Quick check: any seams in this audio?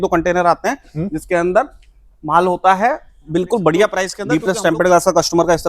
yes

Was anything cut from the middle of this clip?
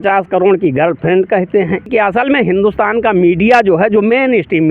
yes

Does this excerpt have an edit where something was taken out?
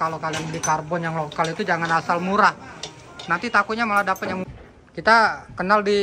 yes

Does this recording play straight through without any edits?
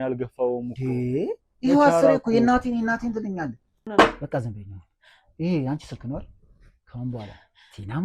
no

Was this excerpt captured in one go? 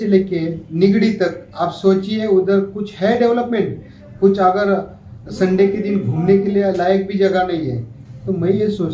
yes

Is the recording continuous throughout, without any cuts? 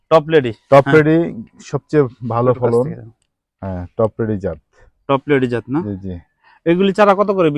yes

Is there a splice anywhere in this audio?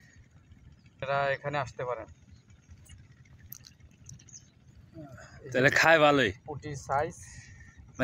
yes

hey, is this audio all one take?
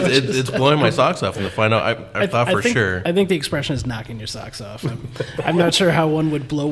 yes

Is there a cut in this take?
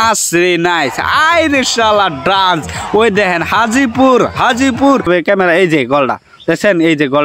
yes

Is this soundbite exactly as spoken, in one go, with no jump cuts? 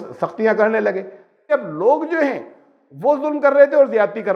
no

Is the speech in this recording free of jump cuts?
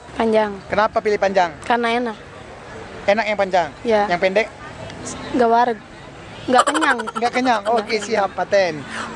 yes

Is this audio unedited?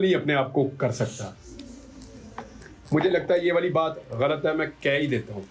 yes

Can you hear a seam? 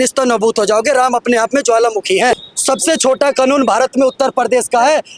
yes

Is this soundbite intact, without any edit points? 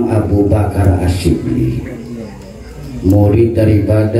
yes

